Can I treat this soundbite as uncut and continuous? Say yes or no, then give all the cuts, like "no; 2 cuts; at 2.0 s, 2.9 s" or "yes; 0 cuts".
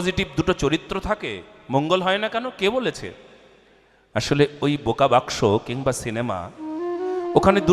yes; 0 cuts